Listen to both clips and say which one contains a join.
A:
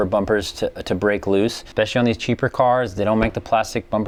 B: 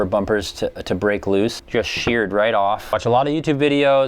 B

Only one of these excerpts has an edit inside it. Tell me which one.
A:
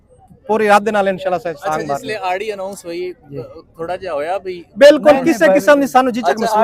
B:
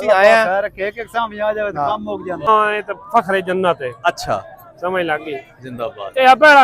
B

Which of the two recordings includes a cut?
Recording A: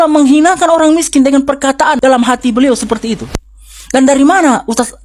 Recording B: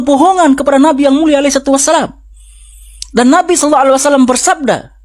A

